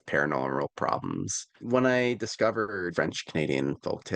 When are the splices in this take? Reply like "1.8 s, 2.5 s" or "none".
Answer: 1.5 s, 2.9 s